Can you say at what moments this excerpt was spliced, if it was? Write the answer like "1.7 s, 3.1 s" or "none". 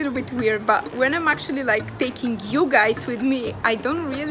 none